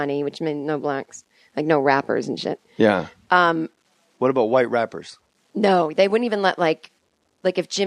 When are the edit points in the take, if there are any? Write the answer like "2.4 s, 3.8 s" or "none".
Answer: 2.0 s